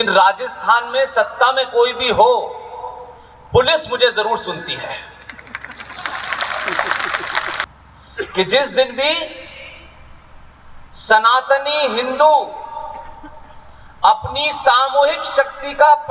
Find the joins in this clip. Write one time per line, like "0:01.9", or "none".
0:07.6

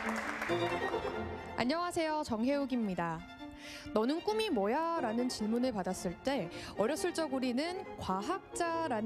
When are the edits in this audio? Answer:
none

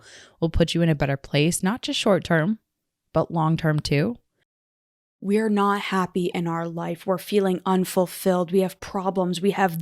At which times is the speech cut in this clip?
0:04.6

